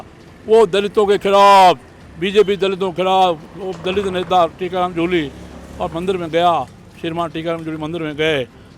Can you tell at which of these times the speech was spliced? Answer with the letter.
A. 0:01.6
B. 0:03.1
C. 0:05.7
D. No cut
D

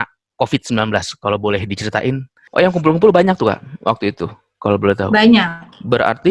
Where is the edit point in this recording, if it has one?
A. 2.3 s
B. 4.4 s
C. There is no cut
A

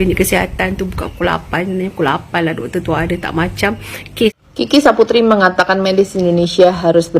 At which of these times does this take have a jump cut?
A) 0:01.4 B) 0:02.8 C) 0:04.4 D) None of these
C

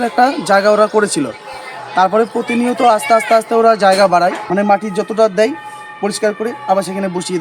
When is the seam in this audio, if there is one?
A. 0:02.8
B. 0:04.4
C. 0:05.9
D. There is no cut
B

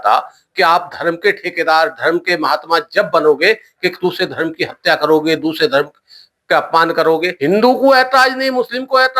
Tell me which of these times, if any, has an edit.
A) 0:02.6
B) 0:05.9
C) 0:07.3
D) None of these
C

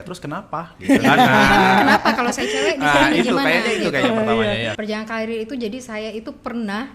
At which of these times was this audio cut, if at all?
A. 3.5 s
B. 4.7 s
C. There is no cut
B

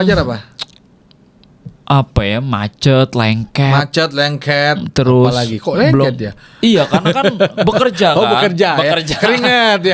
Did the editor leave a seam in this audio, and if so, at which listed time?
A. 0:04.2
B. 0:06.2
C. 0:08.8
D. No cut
D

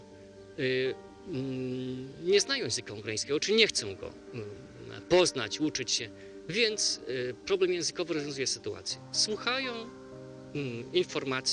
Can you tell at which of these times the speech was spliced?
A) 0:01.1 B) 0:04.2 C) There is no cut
A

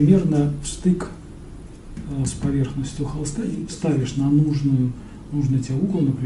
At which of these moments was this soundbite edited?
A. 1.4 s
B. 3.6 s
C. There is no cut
B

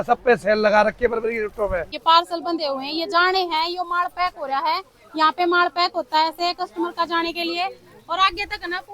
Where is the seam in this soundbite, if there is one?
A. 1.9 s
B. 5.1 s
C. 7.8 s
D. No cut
A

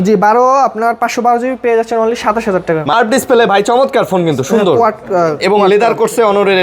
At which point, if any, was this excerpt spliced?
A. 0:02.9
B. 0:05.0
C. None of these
A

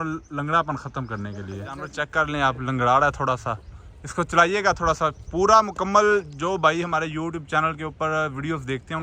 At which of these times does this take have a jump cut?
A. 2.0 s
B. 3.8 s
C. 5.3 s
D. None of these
A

